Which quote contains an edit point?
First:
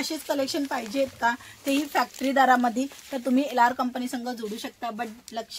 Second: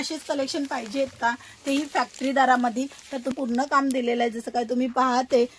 second; 1 cut; at 3.3 s

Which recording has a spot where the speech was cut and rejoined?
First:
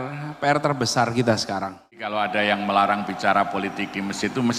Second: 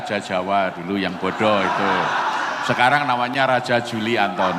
first; 1 cut; at 2.1 s

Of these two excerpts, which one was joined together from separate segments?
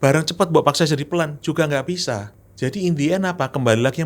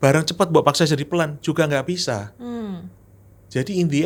first; 1 cut; at 2.4 s

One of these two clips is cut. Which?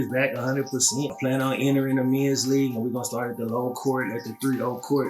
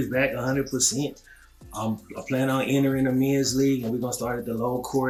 first; 1 cut; at 1.1 s

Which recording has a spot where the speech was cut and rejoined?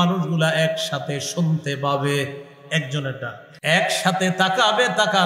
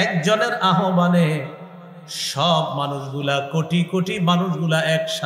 first; 1 cut; at 3.5 s

